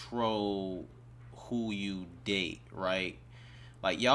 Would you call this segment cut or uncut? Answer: uncut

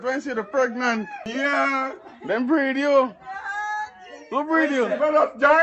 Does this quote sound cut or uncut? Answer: cut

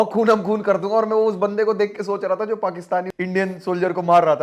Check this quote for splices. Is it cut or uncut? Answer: cut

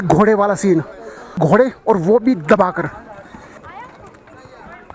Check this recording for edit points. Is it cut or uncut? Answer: cut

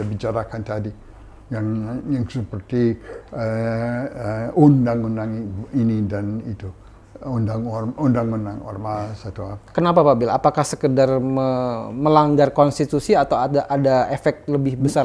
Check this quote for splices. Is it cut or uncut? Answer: uncut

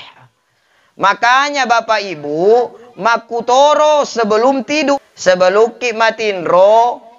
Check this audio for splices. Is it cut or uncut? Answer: cut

